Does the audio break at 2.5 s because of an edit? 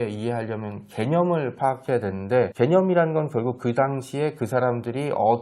yes; 1 cut; at 2.5 s

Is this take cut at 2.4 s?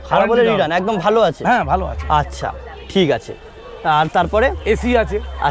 no; 0 cuts

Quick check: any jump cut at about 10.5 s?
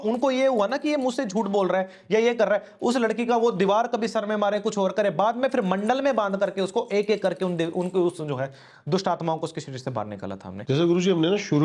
yes; 1 cut; at 10.5 s

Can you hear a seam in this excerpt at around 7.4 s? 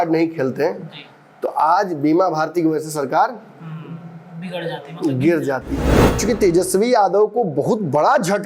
no; 1 cut; at 6.0 s

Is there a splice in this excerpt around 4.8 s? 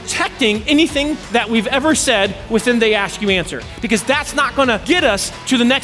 yes; 2 cuts; at 1.2 s, 4.8 s

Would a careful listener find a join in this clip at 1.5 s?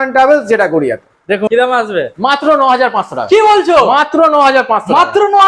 yes; 1 cut; at 1.5 s

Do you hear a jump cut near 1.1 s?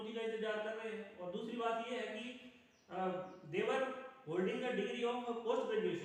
no; 0 cuts

